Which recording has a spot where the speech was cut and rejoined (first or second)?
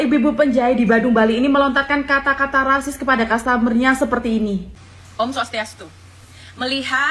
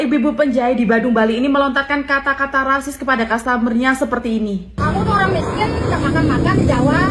first